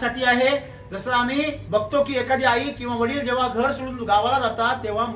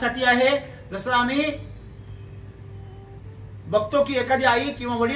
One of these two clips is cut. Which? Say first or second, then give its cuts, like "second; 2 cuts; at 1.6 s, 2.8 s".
first; 1 cut; at 1.6 s